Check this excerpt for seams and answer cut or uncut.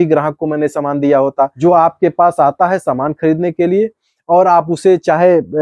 cut